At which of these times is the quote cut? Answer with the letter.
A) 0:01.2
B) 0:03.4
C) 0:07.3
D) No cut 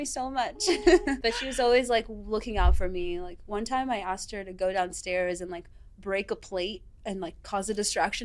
A